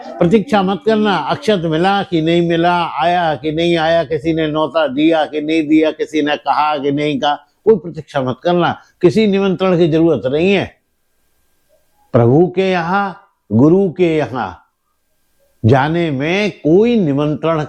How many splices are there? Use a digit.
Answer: 0